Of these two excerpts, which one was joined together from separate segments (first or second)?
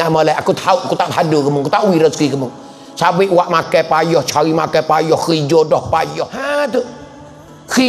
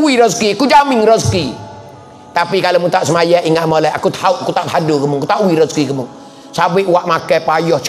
first